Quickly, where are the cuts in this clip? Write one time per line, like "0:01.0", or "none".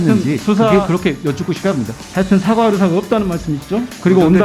0:02.0